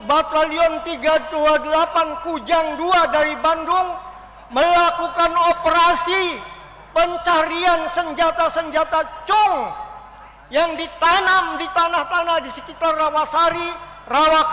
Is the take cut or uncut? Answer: uncut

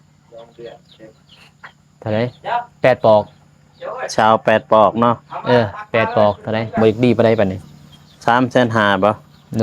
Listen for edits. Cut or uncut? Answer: cut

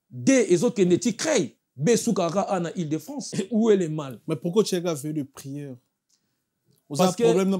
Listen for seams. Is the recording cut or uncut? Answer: cut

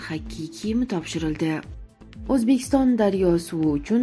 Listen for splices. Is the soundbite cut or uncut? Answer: cut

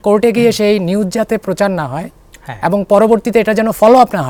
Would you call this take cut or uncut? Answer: uncut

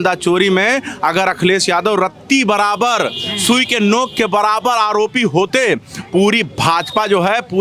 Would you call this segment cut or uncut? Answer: uncut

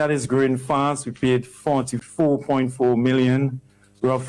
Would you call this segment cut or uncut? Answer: cut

